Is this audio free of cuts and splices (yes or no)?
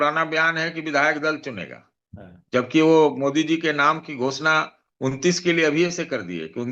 yes